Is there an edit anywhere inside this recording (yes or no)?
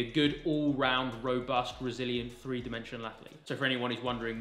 no